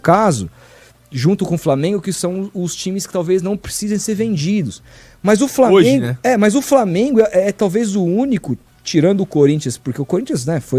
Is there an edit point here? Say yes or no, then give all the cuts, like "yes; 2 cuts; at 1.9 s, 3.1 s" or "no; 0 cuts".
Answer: no; 0 cuts